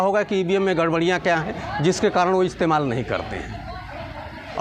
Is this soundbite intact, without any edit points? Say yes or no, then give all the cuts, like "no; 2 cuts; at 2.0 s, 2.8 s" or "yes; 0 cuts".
yes; 0 cuts